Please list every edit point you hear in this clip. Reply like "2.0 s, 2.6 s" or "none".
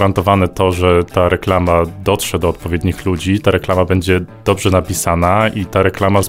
none